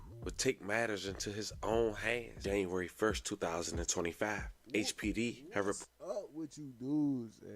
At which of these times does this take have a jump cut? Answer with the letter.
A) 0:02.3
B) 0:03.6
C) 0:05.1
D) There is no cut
A